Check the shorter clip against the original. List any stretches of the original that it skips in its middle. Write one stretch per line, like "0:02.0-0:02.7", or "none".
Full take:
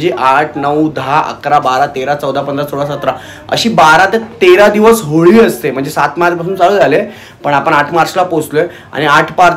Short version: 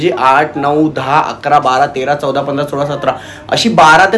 none